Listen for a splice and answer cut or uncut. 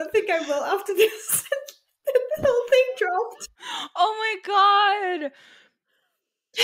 uncut